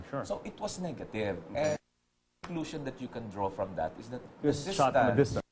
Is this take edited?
yes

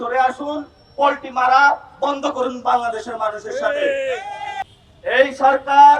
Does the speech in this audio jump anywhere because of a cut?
no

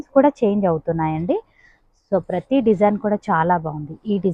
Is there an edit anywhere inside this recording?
no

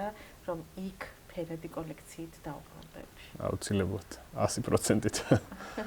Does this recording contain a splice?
no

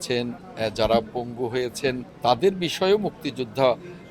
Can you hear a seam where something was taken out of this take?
yes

